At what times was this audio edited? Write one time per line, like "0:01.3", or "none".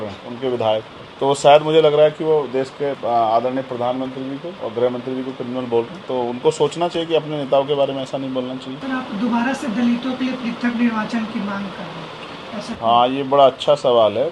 none